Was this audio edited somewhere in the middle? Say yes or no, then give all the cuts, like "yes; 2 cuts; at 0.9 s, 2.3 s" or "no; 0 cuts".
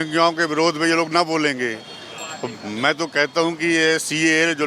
no; 0 cuts